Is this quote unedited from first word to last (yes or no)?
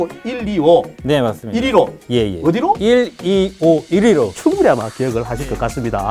yes